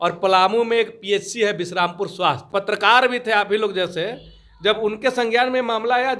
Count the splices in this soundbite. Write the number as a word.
one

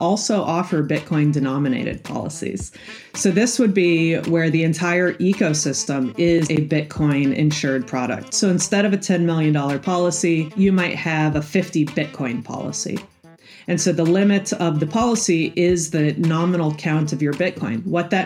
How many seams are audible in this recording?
one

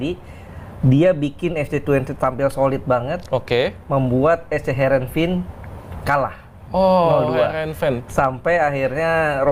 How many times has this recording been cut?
zero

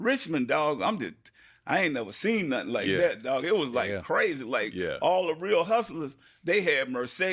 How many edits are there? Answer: zero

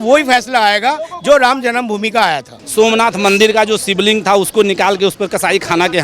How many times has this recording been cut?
one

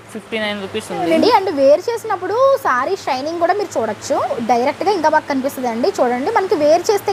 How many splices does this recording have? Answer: two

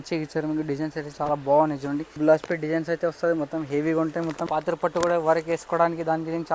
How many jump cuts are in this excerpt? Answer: two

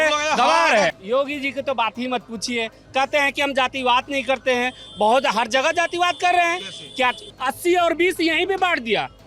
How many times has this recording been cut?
two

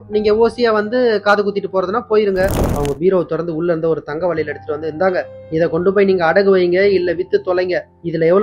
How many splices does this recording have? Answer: one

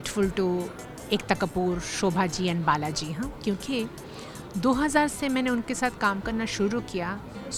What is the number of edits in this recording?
zero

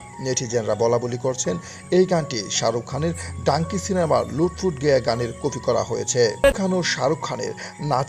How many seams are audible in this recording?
one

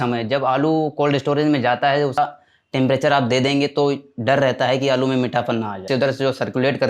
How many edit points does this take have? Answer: two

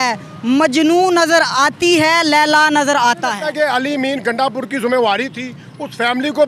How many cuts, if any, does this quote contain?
one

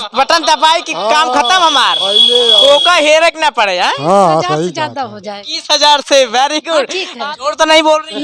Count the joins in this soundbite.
two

